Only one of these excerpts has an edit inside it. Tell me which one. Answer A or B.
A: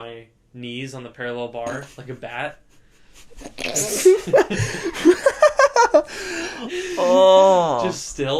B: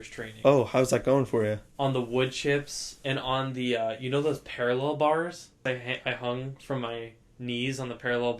B